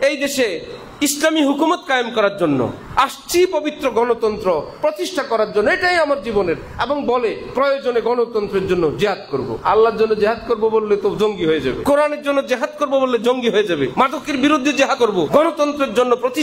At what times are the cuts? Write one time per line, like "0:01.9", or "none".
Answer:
0:09.6
0:11.8
0:13.9
0:15.1